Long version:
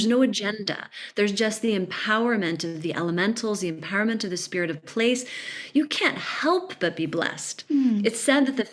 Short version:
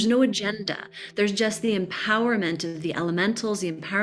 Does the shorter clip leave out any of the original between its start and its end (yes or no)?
no